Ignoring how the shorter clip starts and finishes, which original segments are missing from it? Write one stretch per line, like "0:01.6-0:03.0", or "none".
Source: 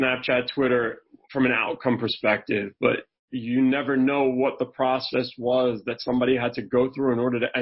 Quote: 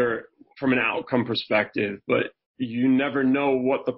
none